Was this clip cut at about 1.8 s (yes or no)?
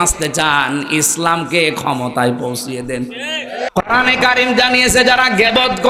no